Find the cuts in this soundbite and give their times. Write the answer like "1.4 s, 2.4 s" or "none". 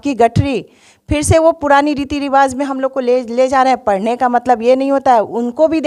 none